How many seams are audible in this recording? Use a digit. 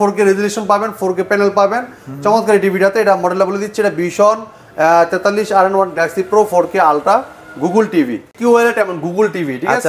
1